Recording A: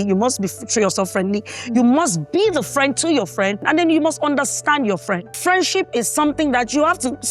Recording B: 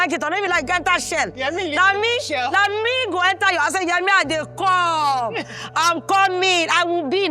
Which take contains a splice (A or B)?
A